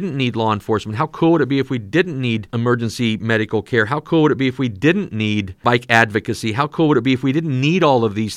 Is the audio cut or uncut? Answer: cut